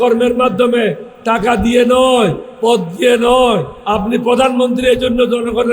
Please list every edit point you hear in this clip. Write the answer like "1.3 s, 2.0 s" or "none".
1.1 s, 2.5 s, 3.7 s